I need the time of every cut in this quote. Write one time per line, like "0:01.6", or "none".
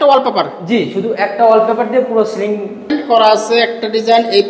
0:02.9